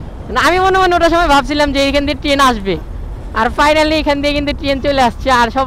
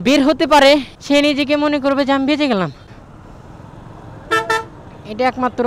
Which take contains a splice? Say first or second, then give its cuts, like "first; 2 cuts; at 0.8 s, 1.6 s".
second; 2 cuts; at 0.9 s, 2.9 s